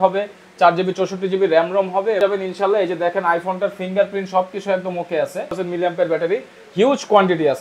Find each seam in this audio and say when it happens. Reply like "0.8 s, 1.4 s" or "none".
2.2 s, 5.6 s